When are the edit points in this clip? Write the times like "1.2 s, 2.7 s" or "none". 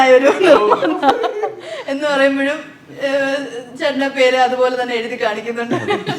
none